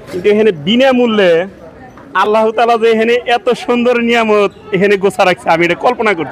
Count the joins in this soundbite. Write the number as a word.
zero